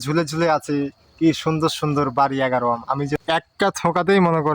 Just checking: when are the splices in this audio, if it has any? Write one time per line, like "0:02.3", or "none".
0:03.2